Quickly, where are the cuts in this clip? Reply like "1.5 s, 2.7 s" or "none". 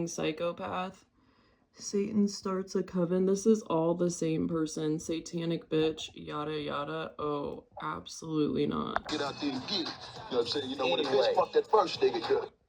9.1 s